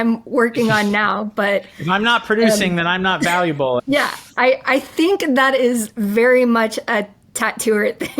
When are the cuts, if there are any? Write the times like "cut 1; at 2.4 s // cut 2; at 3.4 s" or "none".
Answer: cut 1; at 3.8 s